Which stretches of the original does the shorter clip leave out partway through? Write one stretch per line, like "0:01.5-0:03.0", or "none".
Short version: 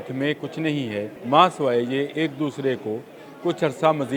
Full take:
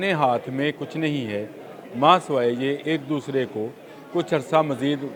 0:01.5-0:01.8

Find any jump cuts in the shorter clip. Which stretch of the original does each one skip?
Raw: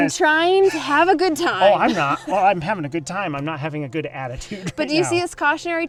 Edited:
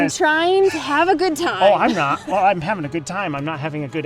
none

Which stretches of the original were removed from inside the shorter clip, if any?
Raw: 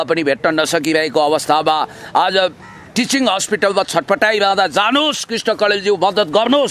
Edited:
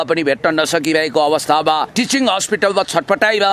0:02.3-0:03.3

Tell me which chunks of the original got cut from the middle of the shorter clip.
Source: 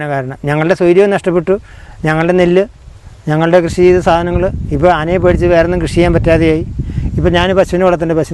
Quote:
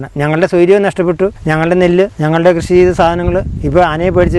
0:01.7-0:02.0
0:02.7-0:03.2

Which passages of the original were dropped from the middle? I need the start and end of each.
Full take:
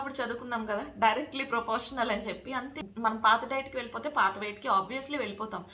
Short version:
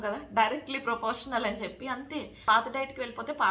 0:03.0-0:03.1

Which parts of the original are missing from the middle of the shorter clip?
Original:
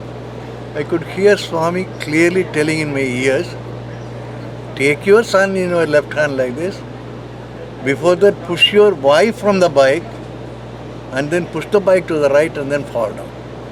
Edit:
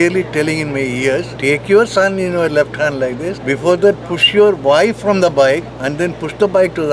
0:03.5-0:04.7
0:06.8-0:07.8
0:10.1-0:11.0

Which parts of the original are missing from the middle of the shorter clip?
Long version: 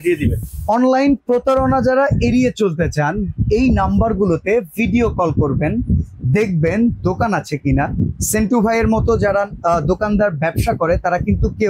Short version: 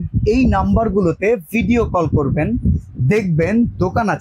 none

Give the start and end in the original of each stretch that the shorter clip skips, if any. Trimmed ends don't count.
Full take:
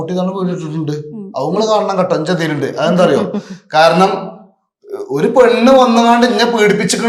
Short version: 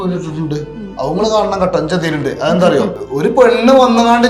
0:03.4-0:05.0

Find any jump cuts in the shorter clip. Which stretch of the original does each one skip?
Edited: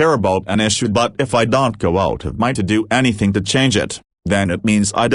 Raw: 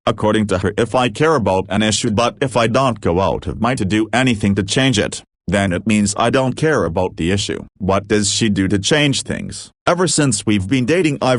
none

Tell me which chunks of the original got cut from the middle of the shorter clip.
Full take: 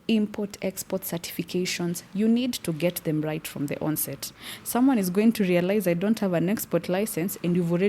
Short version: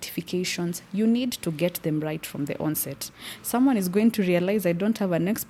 none

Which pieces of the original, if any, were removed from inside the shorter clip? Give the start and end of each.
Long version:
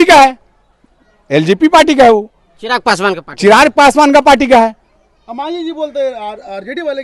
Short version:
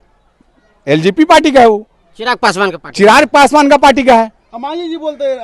0:04.9-0:05.2

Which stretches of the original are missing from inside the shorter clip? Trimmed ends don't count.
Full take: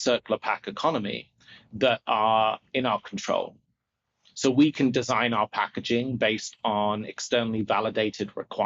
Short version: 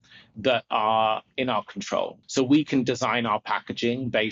0:03.6-0:04.3

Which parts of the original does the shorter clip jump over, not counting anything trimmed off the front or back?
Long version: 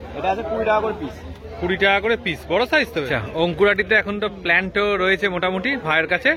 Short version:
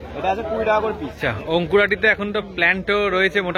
0:01.3-0:03.2

